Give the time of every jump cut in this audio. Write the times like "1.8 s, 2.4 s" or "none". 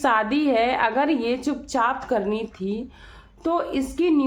none

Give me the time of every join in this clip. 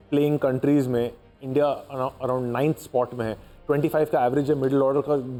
none

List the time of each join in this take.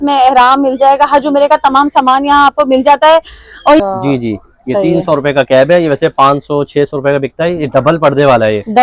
3.8 s

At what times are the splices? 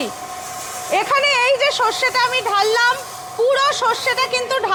none

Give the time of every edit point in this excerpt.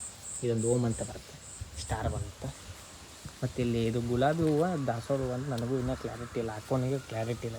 none

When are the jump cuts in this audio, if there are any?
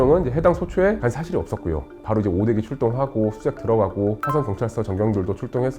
1.9 s

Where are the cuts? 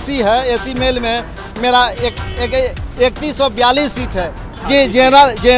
4.4 s

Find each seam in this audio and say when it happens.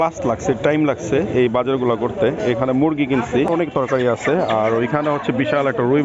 3.5 s

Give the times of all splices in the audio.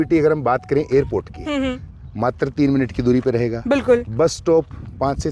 none

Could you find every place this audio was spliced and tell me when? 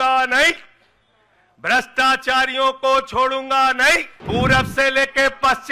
4.1 s

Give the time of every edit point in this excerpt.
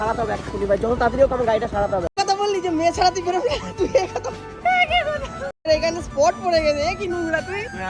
2.1 s, 5.7 s

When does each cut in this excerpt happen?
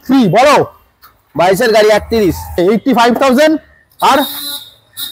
2.6 s

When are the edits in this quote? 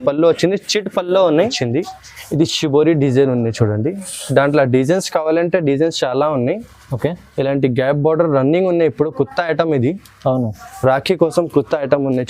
1.6 s

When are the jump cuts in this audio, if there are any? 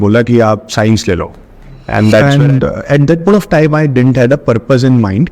2.2 s

